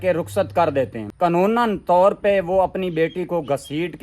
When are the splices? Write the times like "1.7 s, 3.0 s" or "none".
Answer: 1.0 s